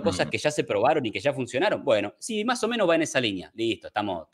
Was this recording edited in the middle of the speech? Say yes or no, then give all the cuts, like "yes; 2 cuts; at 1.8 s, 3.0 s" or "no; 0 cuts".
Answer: no; 0 cuts